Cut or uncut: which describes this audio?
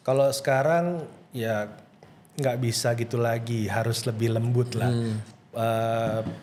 uncut